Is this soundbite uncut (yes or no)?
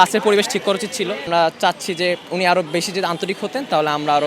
no